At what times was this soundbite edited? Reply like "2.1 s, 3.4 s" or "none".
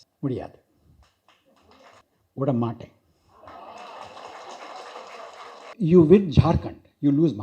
2.0 s, 5.7 s